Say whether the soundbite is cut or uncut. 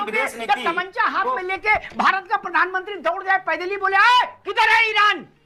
uncut